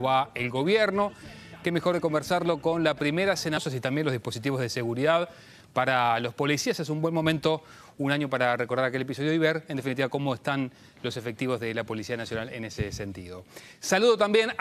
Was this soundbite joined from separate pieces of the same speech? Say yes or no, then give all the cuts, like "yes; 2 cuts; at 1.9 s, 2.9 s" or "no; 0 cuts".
no; 0 cuts